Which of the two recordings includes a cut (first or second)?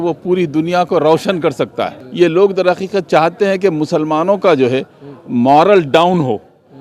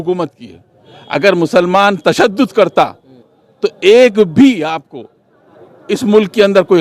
first